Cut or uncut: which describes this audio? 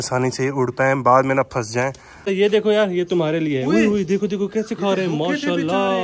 cut